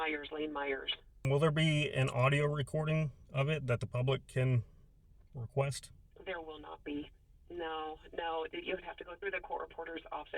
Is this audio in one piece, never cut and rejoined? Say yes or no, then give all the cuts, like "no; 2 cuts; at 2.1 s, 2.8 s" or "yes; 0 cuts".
no; 1 cut; at 1.3 s